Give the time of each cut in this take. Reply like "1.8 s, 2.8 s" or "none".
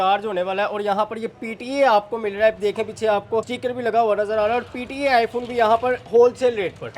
3.5 s

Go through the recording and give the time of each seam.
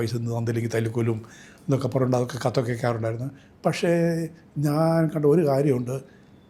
none

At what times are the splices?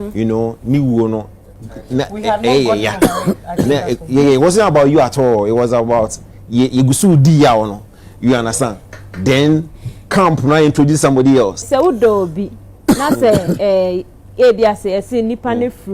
11.6 s

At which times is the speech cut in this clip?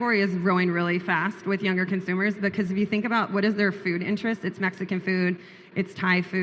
none

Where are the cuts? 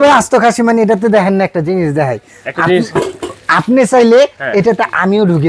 none

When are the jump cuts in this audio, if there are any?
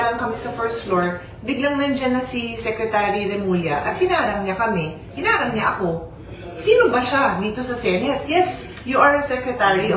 none

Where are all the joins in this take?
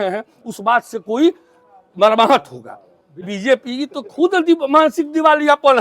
3.3 s

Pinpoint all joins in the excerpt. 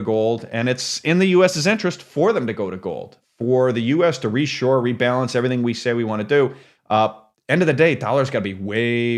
3.1 s, 7.0 s

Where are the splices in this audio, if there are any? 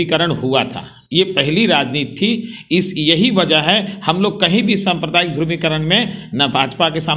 none

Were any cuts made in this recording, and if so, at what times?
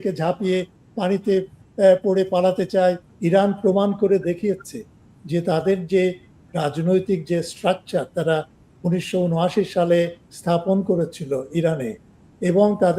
3.1 s

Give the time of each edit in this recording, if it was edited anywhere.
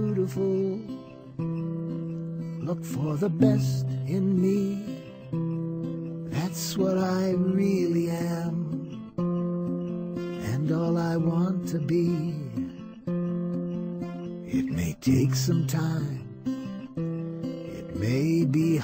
none

